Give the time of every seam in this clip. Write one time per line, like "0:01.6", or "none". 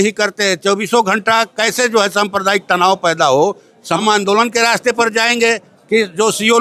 0:04.0